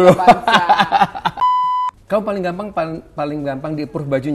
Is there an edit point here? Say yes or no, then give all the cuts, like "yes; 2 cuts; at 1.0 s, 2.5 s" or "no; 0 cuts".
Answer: yes; 1 cut; at 1.4 s